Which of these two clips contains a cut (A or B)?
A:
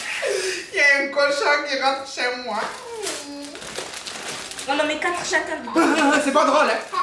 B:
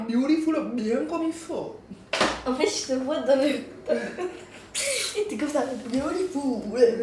A